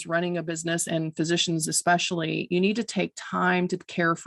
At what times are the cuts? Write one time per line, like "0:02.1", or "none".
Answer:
none